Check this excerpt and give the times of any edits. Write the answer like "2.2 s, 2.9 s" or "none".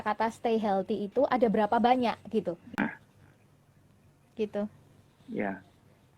2.8 s